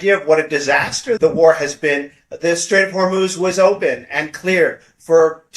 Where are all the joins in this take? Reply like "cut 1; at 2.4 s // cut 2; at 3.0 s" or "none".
cut 1; at 1.2 s